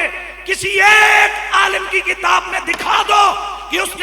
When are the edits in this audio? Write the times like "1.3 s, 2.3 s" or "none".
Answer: none